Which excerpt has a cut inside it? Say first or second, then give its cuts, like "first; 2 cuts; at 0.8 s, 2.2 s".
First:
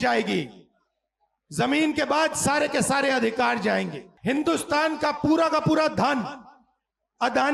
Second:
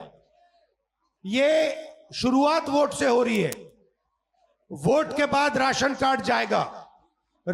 first; 1 cut; at 4.0 s